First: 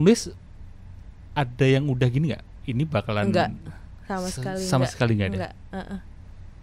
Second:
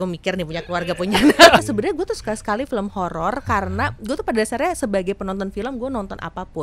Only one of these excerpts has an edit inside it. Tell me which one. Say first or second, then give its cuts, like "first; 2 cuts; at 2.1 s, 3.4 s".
second; 1 cut; at 1.6 s